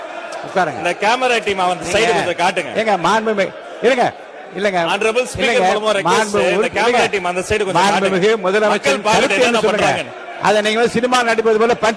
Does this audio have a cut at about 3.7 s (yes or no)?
no